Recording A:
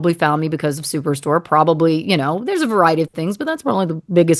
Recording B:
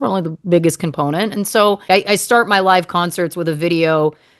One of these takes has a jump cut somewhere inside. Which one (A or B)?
B